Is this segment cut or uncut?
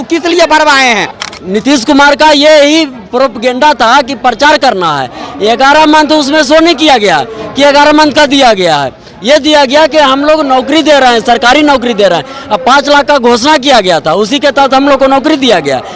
cut